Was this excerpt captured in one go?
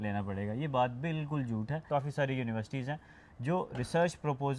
no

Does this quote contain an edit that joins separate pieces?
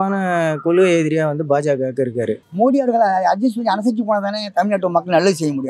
yes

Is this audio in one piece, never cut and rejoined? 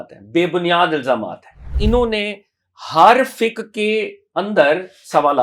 no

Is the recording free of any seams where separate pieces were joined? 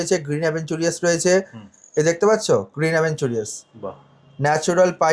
yes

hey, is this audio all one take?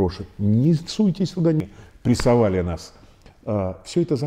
no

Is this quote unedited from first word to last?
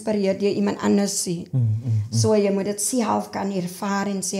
yes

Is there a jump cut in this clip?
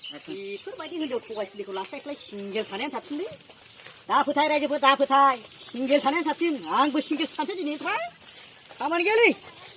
no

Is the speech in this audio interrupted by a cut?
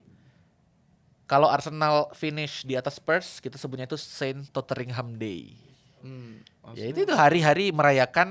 no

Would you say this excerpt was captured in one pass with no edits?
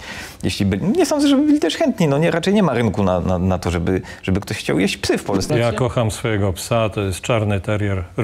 no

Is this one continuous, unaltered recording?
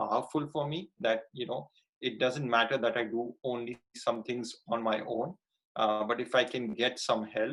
yes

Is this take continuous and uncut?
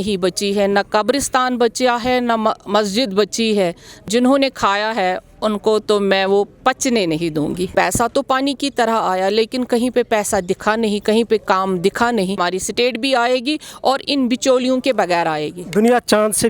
no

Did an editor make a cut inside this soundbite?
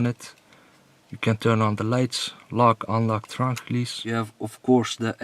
yes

